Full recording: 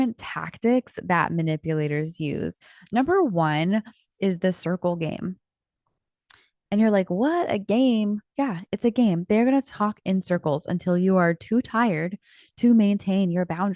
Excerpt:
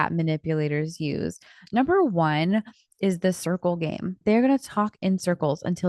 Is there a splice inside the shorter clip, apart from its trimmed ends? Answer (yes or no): yes